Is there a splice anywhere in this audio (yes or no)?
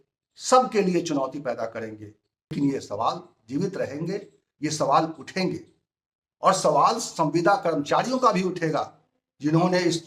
yes